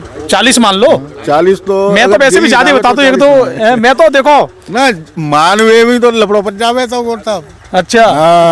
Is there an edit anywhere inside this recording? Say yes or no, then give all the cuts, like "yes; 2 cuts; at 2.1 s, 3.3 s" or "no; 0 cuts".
no; 0 cuts